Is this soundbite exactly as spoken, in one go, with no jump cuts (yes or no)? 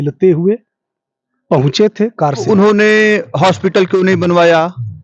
no